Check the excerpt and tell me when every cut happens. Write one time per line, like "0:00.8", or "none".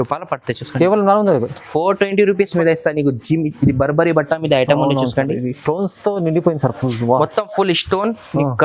0:02.5